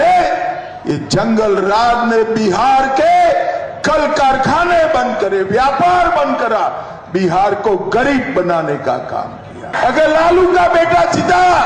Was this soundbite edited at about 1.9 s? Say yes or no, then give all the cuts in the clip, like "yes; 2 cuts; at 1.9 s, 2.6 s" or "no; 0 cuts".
no; 1 cut; at 9.7 s